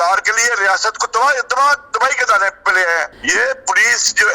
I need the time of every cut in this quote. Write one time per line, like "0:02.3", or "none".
0:03.2